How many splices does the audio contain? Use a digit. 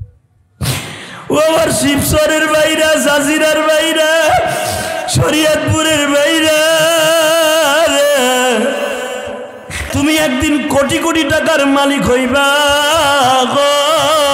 1